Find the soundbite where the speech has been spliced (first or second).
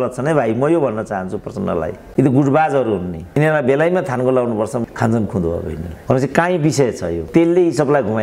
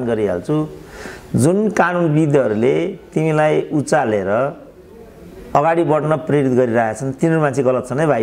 first